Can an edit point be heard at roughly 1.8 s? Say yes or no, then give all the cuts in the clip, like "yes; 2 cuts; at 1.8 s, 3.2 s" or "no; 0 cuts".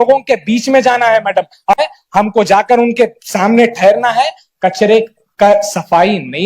yes; 1 cut; at 1.8 s